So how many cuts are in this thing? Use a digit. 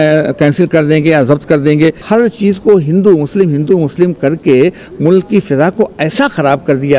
1